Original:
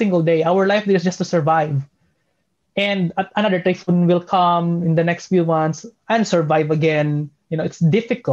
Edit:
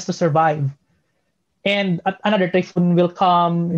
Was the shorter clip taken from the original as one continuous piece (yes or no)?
yes